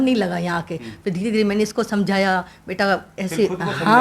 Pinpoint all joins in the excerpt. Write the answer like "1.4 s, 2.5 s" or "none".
none